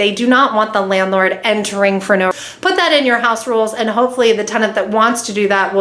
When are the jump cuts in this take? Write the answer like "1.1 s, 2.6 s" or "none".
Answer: 2.3 s